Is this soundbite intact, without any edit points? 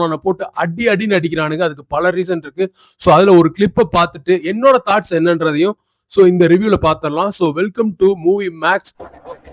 yes; 0 cuts

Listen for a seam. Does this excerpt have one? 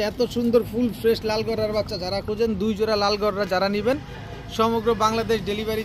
no; 0 cuts

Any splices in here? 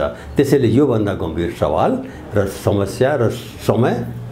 no; 0 cuts

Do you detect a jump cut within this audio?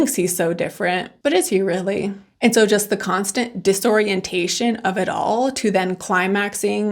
yes; 1 cut; at 2.2 s

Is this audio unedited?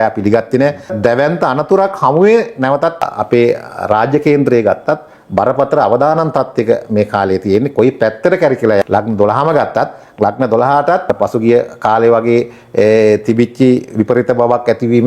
no; 4 cuts; at 0.9 s, 3.0 s, 8.8 s, 11.1 s

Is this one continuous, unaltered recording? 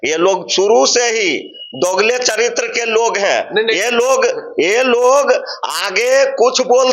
yes; 0 cuts

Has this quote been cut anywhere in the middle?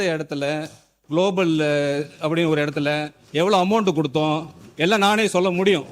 no; 0 cuts

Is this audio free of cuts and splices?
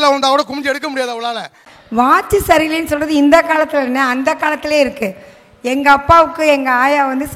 no; 1 cut; at 1.6 s

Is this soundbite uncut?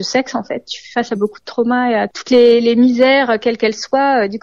no; 1 cut; at 2.2 s

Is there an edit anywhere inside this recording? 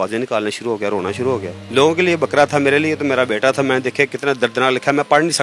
yes; 1 cut; at 1.5 s

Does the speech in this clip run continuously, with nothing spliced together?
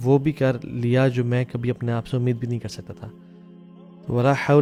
yes; 0 cuts

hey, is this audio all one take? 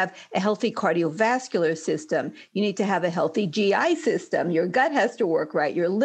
yes; 0 cuts

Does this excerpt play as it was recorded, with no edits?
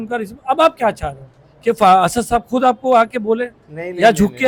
yes; 0 cuts

